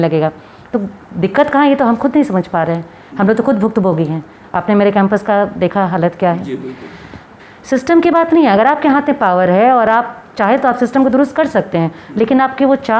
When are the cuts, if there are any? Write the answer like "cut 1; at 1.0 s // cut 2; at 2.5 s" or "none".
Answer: none